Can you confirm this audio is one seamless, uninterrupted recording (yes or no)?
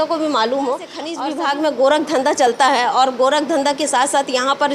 no